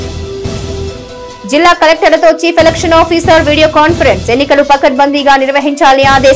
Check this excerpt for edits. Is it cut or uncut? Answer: cut